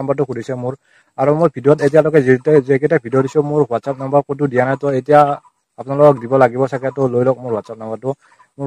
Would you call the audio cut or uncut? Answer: uncut